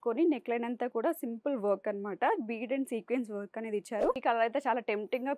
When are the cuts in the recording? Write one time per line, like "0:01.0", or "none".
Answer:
0:04.2